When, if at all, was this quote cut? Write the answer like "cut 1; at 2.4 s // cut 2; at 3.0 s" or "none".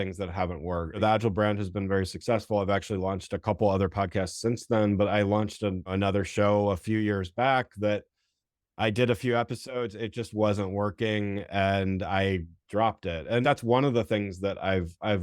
cut 1; at 1.0 s // cut 2; at 5.9 s // cut 3; at 13.4 s